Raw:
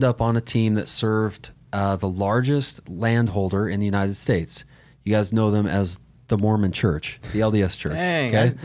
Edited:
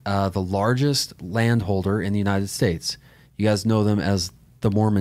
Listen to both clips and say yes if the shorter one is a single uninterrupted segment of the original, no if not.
yes